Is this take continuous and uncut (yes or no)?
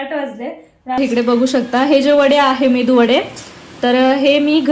no